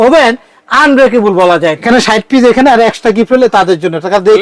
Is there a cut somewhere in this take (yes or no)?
yes